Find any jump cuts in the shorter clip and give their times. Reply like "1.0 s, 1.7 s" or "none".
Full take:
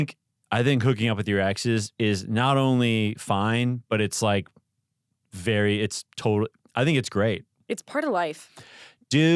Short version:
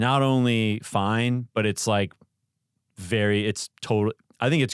none